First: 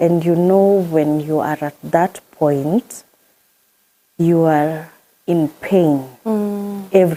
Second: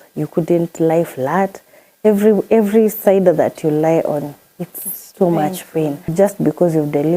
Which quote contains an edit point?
second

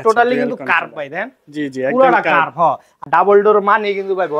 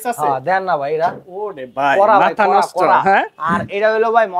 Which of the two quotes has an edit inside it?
first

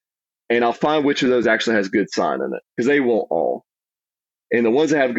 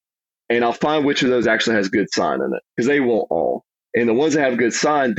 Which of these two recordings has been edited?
second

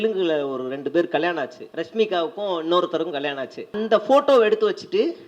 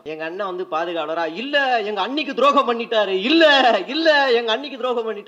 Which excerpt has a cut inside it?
first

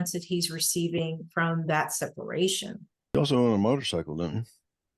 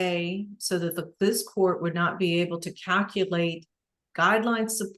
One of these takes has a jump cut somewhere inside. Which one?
first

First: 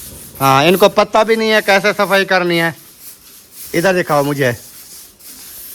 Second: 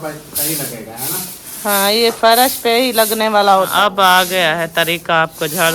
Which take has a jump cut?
second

